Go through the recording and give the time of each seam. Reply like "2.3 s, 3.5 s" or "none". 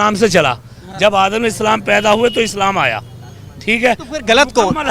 none